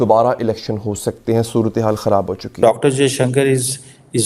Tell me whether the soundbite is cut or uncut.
cut